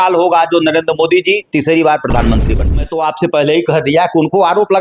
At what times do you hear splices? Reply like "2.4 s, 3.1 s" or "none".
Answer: 2.7 s